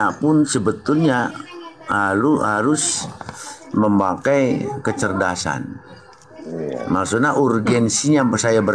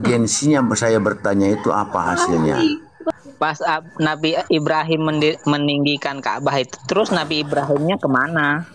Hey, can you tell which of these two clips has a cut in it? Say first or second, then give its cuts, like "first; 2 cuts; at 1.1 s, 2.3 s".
second; 1 cut; at 3.1 s